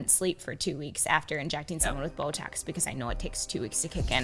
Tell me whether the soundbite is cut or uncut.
uncut